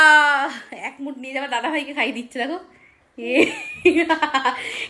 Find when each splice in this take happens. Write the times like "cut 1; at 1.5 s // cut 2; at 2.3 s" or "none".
none